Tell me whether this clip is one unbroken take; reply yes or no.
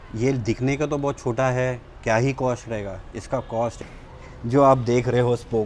no